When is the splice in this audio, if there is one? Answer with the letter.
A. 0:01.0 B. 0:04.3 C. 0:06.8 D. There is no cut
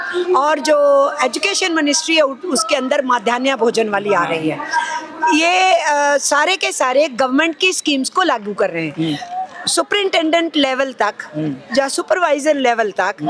D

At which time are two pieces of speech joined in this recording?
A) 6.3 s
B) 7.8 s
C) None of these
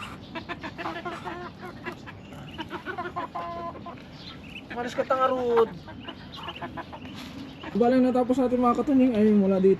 B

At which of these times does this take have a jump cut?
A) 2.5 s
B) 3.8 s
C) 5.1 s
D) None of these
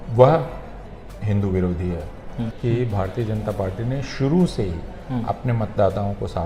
A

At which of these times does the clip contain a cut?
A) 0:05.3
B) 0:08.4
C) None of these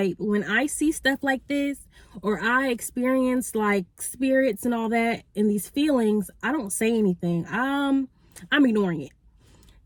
C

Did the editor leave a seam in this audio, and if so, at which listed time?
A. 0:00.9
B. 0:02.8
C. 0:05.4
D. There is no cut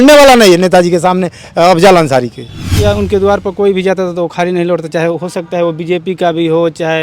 B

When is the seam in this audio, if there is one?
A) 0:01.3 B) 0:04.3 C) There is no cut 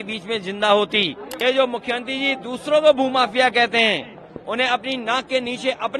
A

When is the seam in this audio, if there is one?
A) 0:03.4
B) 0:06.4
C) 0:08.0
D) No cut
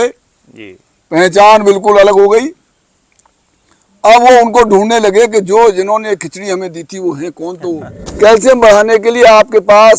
C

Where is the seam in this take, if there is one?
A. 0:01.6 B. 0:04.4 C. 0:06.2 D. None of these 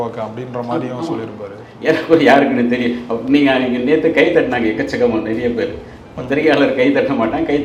D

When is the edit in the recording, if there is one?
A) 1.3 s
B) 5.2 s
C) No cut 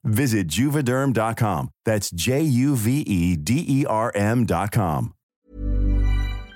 B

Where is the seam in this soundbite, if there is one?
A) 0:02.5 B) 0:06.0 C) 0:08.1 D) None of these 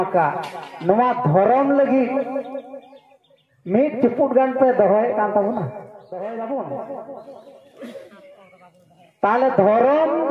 B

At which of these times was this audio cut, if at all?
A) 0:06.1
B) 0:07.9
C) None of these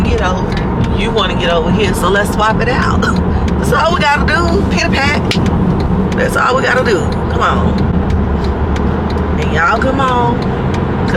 C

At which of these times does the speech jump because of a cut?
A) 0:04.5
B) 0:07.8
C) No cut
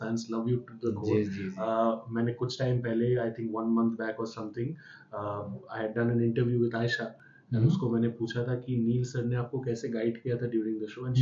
C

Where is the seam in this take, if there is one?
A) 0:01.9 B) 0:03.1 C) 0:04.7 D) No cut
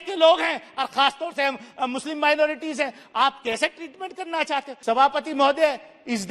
C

